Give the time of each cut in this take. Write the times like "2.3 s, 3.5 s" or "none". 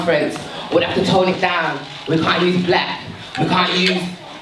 1.7 s